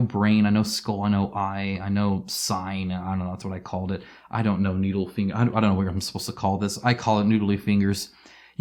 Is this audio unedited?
yes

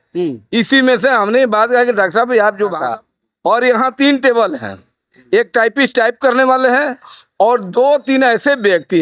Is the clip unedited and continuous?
no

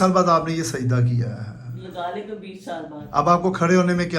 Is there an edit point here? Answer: yes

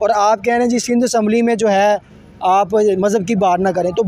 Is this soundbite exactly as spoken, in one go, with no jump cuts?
yes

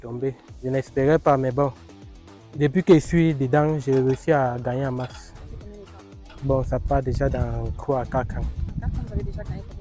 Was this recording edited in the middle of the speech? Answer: no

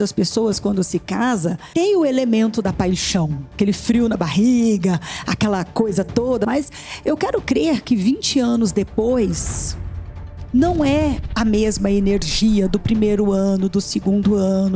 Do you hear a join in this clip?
yes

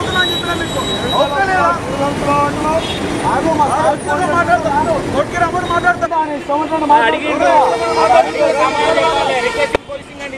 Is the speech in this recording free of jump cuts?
yes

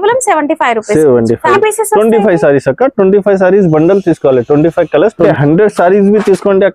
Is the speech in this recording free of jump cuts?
no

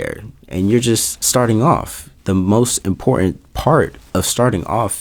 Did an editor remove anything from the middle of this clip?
yes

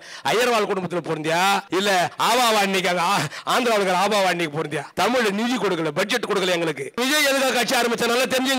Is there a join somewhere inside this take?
yes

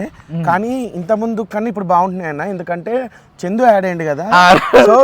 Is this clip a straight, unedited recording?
yes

